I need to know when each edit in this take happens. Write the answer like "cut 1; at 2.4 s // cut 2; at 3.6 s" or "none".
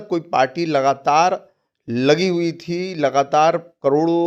none